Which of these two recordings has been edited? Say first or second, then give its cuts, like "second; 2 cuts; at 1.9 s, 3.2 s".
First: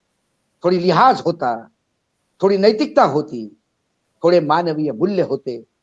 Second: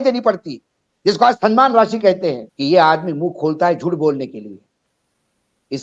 second; 1 cut; at 2.5 s